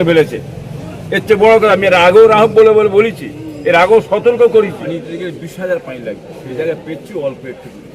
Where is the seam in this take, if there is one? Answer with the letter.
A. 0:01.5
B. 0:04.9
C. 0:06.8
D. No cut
B